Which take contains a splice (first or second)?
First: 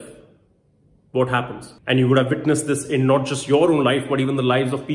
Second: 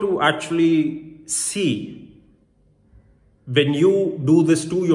first